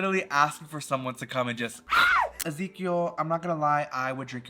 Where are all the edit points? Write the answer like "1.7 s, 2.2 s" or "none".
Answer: 2.4 s

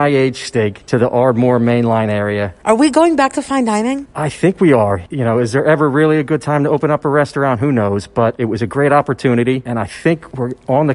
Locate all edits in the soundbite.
2.6 s

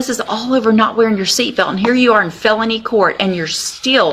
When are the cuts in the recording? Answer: none

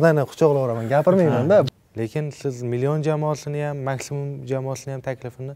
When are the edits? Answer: 1.7 s

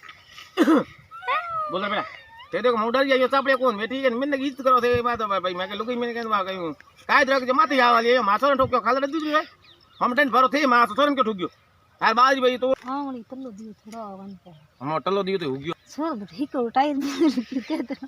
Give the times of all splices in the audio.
12.7 s

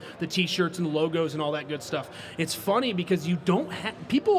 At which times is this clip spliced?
none

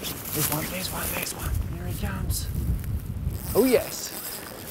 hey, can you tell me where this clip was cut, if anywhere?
1.5 s, 3.4 s

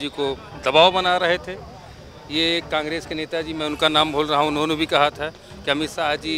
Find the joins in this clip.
none

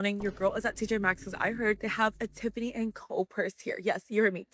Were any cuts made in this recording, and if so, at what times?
none

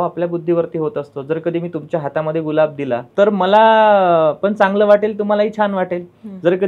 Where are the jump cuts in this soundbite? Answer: 3.1 s

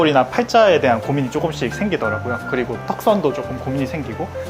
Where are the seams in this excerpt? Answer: none

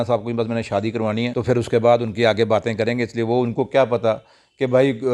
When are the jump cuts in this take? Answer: 1.3 s

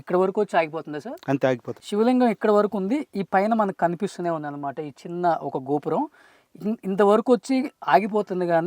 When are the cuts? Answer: 1.7 s

